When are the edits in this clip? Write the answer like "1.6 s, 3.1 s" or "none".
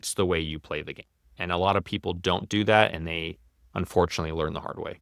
none